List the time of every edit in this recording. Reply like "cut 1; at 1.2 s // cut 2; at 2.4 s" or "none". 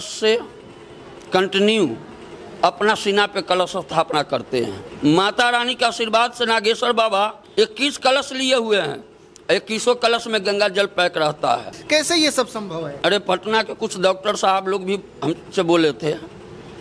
cut 1; at 4.8 s // cut 2; at 7.4 s // cut 3; at 11.8 s // cut 4; at 12.9 s